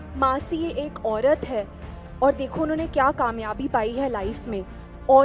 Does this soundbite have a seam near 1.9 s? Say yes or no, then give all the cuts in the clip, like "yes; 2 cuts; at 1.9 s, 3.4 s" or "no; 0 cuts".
no; 0 cuts